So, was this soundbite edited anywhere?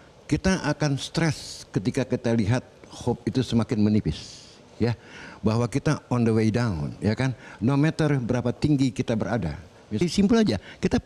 yes; 1 cut; at 10.0 s

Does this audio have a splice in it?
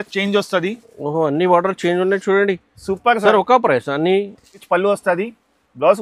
yes; 1 cut; at 4.6 s

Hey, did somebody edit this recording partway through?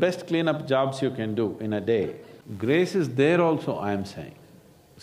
no; 0 cuts

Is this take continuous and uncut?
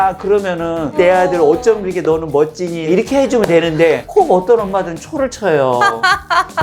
no; 2 cuts; at 0.9 s, 2.9 s

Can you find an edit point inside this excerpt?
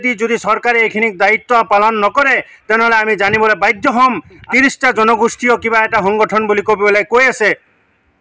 yes; 1 cut; at 4.4 s

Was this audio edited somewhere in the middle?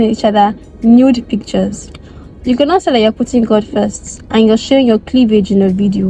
no; 0 cuts

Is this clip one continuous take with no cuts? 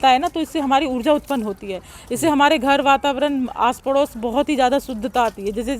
yes; 0 cuts

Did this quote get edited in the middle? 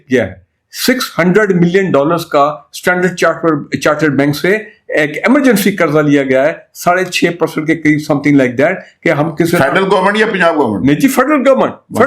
no; 0 cuts

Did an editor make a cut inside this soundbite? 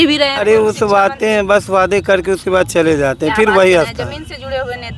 no; 0 cuts

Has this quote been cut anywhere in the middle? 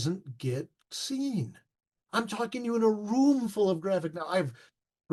no; 0 cuts

